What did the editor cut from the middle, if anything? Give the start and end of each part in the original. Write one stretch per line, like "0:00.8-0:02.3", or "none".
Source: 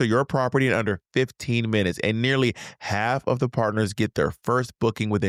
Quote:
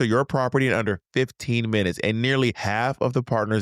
0:02.6-0:02.9